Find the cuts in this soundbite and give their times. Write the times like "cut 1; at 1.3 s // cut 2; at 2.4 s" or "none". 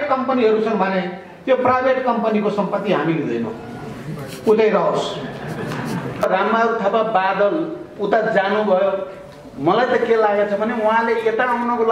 cut 1; at 6.2 s